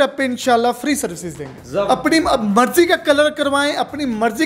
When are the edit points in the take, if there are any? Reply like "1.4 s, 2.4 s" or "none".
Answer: 1.9 s